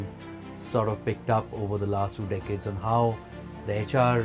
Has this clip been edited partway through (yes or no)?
no